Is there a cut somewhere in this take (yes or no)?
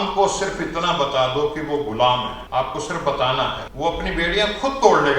yes